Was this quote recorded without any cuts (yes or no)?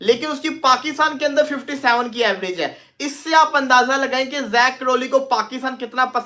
yes